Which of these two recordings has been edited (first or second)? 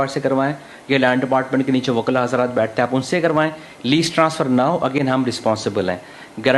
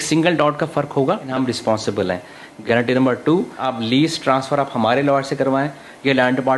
second